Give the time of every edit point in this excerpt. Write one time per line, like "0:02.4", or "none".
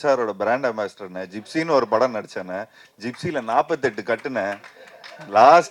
none

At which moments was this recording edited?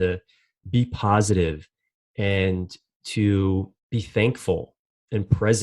0:03.8

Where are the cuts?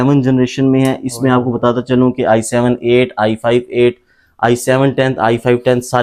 none

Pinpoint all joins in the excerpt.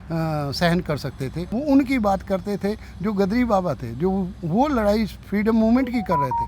0:01.4

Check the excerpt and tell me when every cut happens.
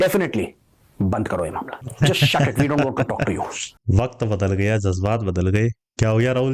0:01.8

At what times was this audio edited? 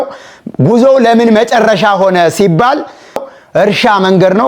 0:03.2

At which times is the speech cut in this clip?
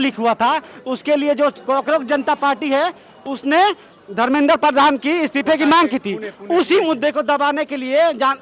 none

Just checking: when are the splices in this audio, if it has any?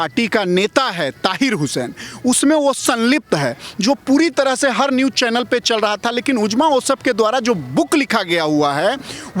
none

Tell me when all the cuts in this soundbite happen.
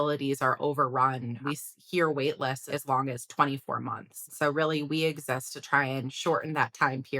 0:01.4
0:02.6
0:04.2

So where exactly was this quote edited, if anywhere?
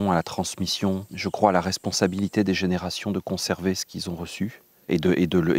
0:01.1
0:04.7

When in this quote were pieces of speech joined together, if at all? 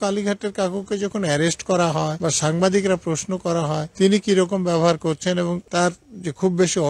0:02.1
0:03.9
0:05.6

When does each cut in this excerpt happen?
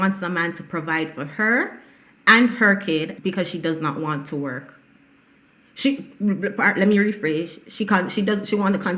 0:03.1

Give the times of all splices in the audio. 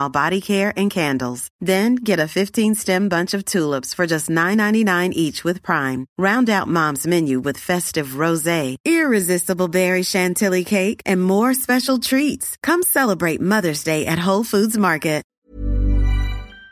0:15.3

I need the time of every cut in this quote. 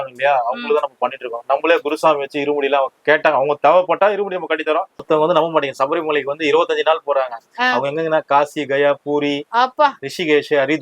0:05.0

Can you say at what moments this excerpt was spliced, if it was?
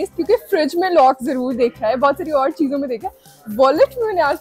none

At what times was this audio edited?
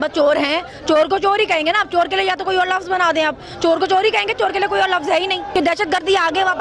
0:05.4

